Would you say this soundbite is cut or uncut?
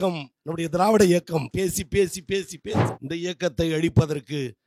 cut